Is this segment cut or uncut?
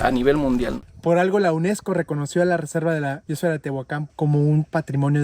cut